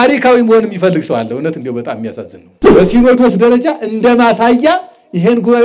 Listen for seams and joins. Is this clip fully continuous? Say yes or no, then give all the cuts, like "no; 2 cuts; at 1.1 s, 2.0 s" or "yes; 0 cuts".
no; 1 cut; at 2.5 s